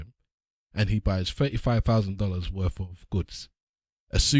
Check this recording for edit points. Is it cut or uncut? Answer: uncut